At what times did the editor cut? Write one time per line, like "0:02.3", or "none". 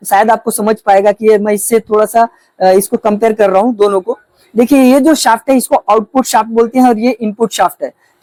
none